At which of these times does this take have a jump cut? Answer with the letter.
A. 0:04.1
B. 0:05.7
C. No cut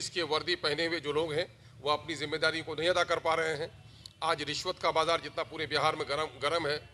C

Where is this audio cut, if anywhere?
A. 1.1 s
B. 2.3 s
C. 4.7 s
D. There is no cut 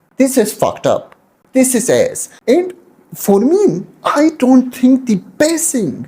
B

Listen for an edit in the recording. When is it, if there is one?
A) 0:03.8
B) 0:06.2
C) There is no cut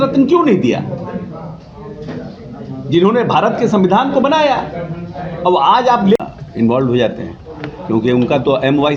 B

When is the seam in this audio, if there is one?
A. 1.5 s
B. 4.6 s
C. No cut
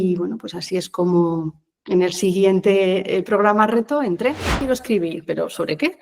B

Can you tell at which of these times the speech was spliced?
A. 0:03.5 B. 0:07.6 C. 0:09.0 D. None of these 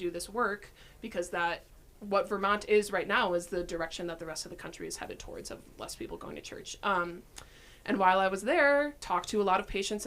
C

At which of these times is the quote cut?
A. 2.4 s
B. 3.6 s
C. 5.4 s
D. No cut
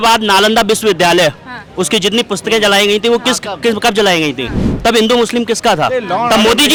D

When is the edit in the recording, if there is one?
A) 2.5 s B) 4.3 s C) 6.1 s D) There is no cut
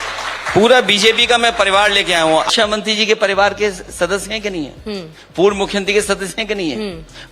A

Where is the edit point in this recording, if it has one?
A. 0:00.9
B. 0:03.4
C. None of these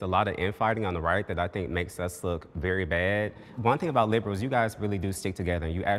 B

